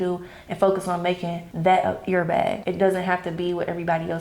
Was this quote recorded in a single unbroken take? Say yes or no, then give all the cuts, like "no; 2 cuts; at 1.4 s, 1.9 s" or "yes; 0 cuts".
no; 2 cuts; at 1.4 s, 2.6 s